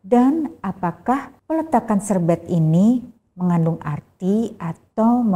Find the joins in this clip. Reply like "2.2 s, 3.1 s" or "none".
1.3 s